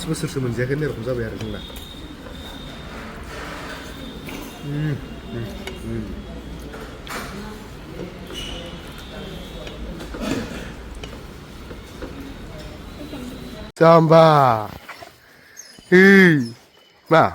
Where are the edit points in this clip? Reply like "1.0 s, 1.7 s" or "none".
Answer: 13.7 s